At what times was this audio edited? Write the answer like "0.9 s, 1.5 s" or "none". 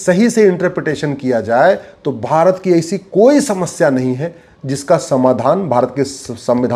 none